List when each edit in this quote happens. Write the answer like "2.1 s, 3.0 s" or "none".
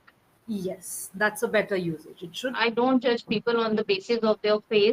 2.6 s